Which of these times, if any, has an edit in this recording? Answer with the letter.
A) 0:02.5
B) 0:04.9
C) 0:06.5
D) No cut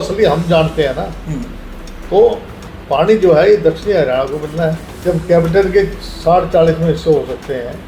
B